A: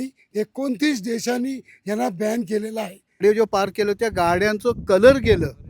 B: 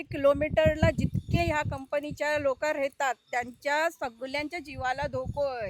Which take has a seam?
A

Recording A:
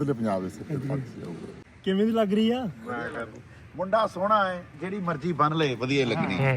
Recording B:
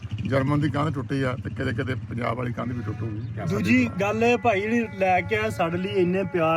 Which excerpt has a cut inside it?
A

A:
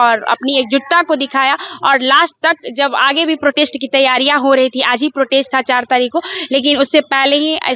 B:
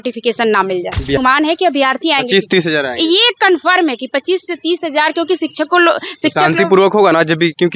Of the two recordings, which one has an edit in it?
B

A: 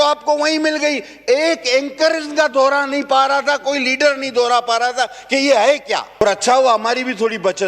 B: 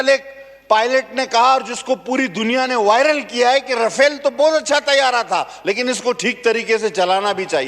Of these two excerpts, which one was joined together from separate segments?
A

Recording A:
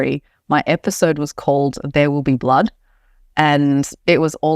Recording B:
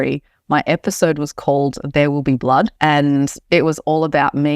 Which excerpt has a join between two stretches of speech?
B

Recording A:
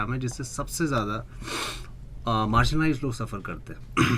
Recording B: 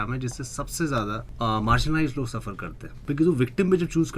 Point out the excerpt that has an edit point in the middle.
B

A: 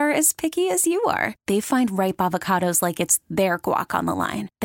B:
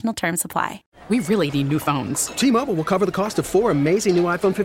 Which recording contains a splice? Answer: B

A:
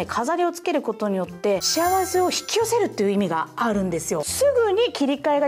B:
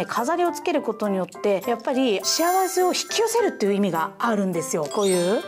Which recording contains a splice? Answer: A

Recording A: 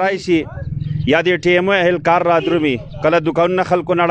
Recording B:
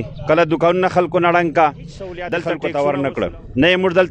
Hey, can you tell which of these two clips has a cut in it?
B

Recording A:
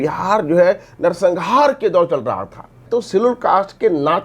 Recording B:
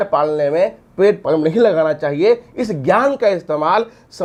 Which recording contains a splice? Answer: A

